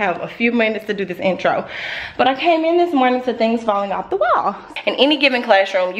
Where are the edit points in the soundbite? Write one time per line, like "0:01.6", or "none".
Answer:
0:04.7